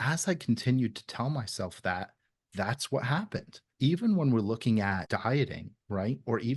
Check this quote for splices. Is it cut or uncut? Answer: cut